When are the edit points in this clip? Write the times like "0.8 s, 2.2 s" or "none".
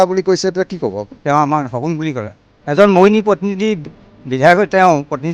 1.1 s